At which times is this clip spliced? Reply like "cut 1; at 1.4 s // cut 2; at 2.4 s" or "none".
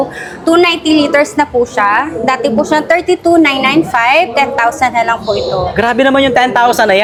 none